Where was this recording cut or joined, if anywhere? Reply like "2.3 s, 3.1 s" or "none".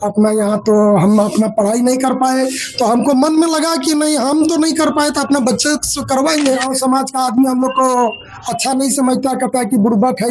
6.7 s